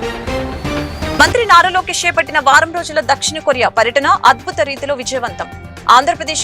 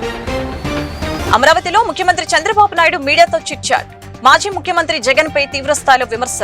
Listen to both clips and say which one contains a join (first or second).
first